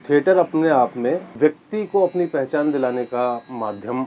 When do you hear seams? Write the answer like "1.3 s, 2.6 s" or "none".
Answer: 1.3 s